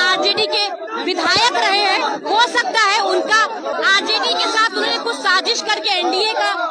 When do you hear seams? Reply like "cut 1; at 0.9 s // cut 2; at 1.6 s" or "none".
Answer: cut 1; at 3.7 s